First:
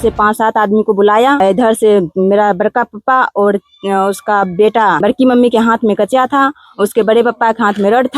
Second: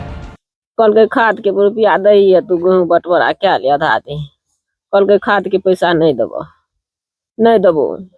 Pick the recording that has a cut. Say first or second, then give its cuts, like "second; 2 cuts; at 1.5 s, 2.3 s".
first; 2 cuts; at 1.4 s, 5.0 s